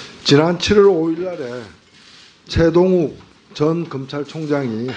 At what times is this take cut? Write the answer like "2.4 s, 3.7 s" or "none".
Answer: none